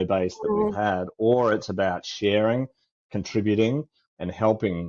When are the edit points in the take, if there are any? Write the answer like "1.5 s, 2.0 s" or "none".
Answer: none